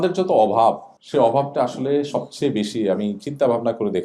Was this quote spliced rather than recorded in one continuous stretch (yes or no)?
yes